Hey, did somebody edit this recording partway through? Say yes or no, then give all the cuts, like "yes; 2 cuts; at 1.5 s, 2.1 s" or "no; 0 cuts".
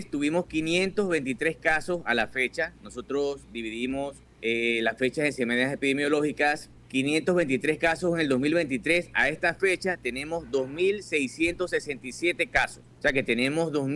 yes; 3 cuts; at 4.2 s, 6.7 s, 12.8 s